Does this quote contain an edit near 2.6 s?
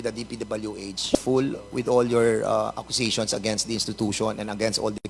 no; 1 cut; at 1.2 s

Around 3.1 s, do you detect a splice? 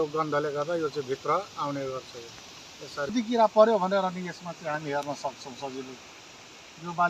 yes; 1 cut; at 3.1 s

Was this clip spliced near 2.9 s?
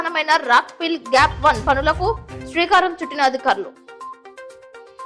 no; 0 cuts

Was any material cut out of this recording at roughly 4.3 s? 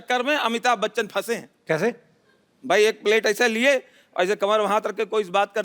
no; 0 cuts

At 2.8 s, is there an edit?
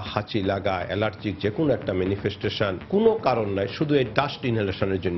yes; 1 cut; at 2.8 s

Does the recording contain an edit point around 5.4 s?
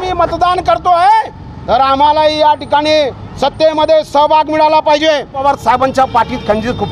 yes; 1 cut; at 5.4 s

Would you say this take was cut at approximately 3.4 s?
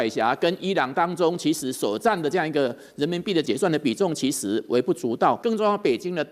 yes; 2 cuts; at 3.4 s, 5.4 s

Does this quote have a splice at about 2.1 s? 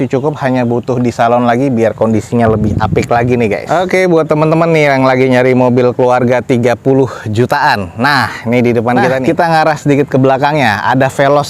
no; 2 cuts; at 3.6 s, 9.2 s

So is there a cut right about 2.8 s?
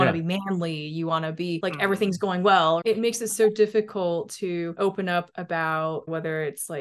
yes; 1 cut; at 2.8 s

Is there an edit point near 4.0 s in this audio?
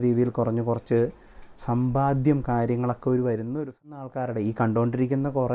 yes; 1 cut; at 4.0 s

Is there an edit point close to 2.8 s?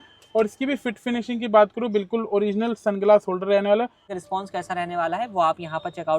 no; 1 cut; at 4.1 s

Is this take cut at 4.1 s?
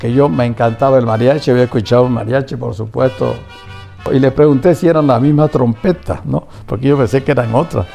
yes; 1 cut; at 4.1 s

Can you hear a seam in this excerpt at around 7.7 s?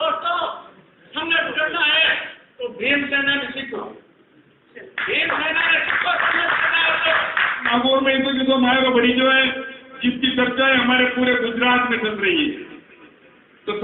yes; 1 cut; at 7.7 s

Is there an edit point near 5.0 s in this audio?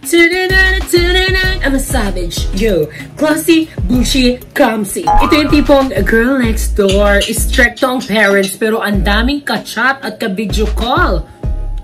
yes; 1 cut; at 5.0 s

